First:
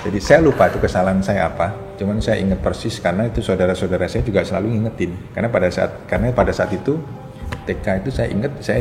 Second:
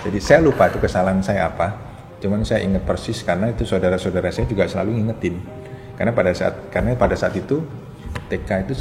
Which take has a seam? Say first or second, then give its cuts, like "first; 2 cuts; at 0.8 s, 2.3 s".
first; 2 cuts; at 1.9 s, 5.2 s